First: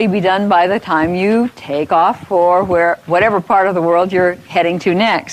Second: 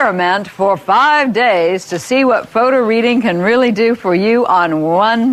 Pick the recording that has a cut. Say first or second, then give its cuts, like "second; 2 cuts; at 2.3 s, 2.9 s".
first; 1 cut; at 3.2 s